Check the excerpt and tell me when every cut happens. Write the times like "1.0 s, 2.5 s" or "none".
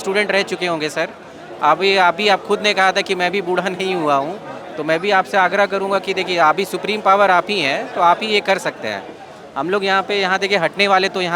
none